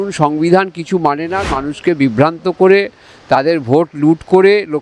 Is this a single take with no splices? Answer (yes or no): no